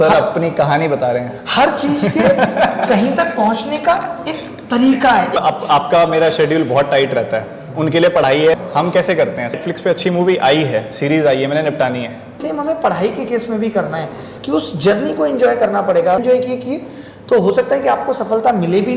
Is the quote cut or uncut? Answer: cut